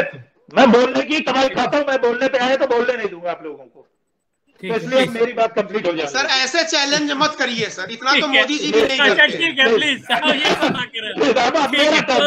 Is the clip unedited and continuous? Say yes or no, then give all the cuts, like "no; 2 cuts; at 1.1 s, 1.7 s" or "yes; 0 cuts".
yes; 0 cuts